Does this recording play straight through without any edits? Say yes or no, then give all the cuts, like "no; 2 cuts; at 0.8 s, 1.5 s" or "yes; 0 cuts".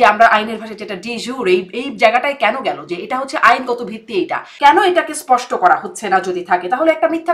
no; 1 cut; at 4.4 s